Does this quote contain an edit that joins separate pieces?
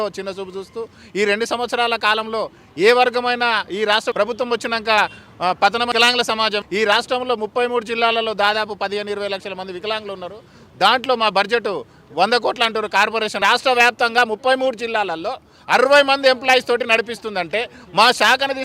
yes; 2 cuts; at 6.2 s, 13.4 s

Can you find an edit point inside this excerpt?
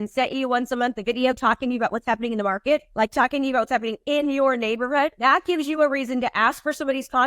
yes; 2 cuts; at 2.9 s, 5.1 s

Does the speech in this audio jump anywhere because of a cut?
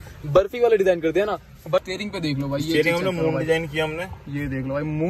yes; 1 cut; at 1.9 s

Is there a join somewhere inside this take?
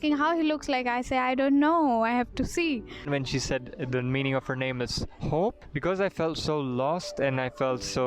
yes; 2 cuts; at 3.1 s, 5.7 s

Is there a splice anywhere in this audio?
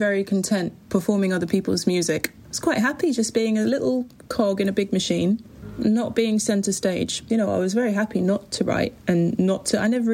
yes; 3 cuts; at 2.3 s, 5.6 s, 7.2 s

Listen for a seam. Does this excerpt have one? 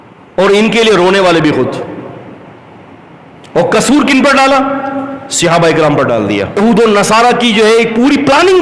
yes; 1 cut; at 6.6 s

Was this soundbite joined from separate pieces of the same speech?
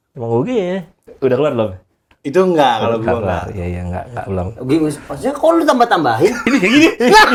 no; 0 cuts

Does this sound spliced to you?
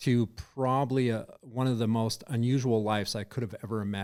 no; 0 cuts

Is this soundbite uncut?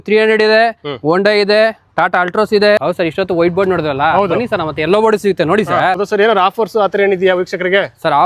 no; 2 cuts; at 2.8 s, 6.0 s

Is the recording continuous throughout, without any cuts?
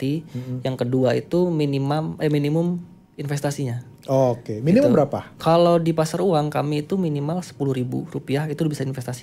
yes; 0 cuts

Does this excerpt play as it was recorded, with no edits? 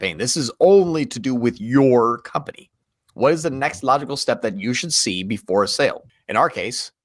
no; 1 cut; at 6.1 s

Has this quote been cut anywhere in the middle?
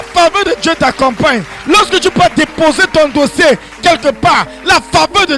no; 0 cuts

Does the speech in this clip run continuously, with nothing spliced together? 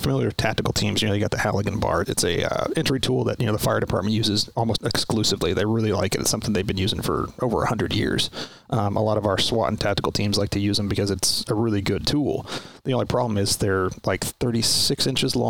no; 2 cuts; at 2.1 s, 4.7 s

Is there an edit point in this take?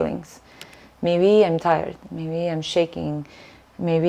no; 0 cuts

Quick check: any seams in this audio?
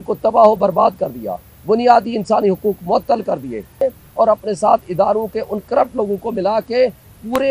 yes; 1 cut; at 3.8 s

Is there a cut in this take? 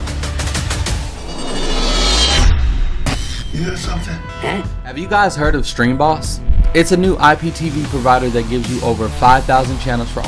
yes; 1 cut; at 1.2 s

